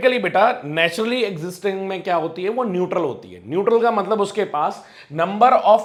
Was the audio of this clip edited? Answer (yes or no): no